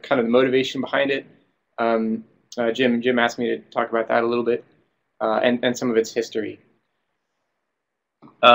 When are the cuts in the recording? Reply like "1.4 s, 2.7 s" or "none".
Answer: none

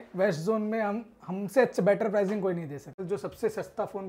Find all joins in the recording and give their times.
3.0 s

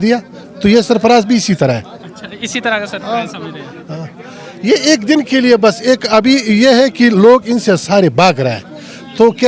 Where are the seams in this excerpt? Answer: none

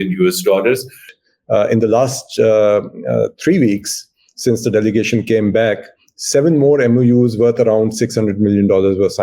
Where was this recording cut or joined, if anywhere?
1.2 s

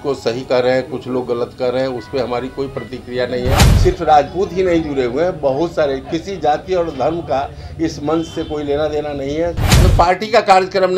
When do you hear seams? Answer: 3.7 s, 9.7 s

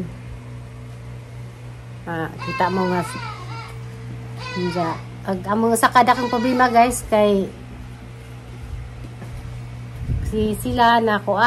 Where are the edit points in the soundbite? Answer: none

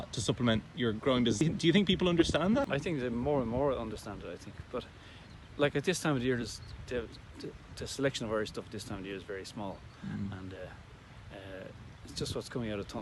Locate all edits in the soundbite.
1.4 s, 2.7 s

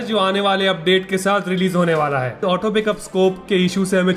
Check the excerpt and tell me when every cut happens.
2.4 s

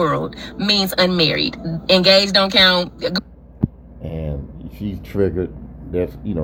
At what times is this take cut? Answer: none

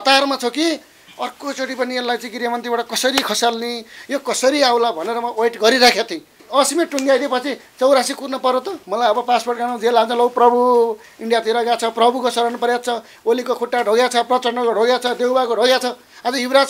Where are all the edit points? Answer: 6.4 s, 8.8 s

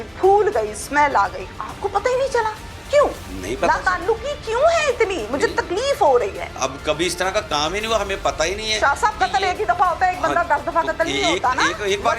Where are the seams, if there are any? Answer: 1.5 s, 6.5 s

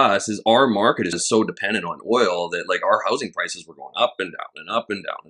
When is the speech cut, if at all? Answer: 1.2 s

